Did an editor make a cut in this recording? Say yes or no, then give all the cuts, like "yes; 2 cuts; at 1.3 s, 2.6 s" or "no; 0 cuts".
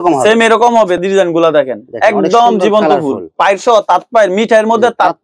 yes; 2 cuts; at 1.0 s, 3.2 s